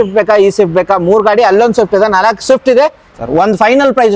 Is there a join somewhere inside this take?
yes; 1 cut; at 3.0 s

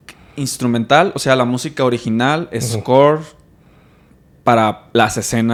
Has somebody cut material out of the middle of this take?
no; 0 cuts

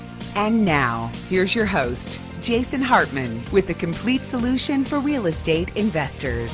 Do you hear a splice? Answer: yes; 1 cut; at 1.8 s

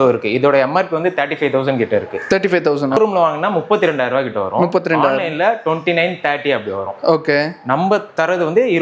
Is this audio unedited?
yes; 0 cuts

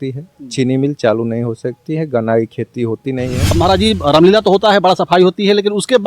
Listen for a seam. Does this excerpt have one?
yes; 1 cut; at 3.6 s

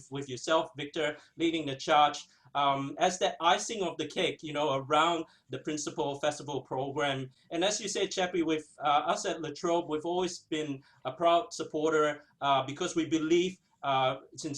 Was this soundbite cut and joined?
no; 0 cuts

